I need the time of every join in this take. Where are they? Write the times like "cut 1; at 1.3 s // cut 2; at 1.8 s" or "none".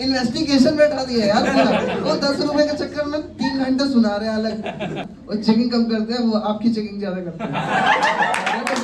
cut 1; at 5.1 s